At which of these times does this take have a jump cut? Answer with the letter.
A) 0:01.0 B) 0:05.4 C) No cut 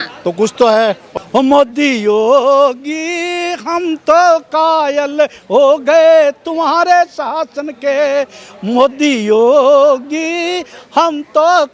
A